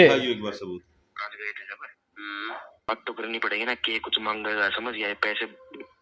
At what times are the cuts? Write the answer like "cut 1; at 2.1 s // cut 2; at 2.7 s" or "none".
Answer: cut 1; at 2.9 s